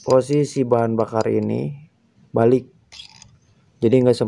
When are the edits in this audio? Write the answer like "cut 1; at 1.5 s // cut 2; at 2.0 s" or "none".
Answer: none